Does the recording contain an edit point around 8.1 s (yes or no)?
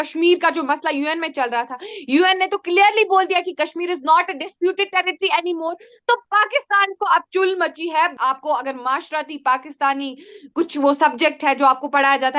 yes